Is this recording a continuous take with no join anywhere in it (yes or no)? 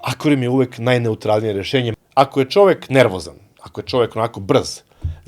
no